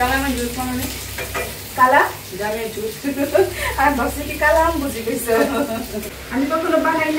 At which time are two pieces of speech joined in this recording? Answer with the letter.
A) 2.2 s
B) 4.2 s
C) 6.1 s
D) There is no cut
C